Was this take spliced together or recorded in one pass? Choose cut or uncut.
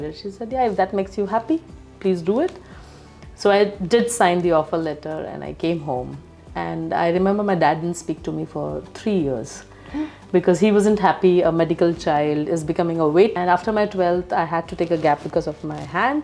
cut